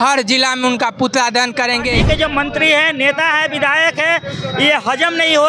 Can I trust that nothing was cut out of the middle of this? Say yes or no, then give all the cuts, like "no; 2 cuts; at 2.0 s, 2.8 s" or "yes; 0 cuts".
no; 1 cut; at 2.0 s